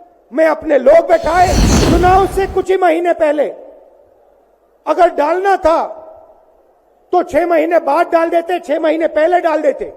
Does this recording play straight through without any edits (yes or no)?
no